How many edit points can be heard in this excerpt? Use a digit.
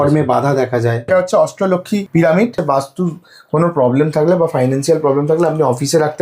3